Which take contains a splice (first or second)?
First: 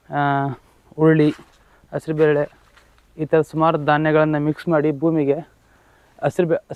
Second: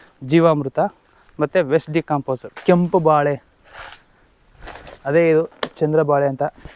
second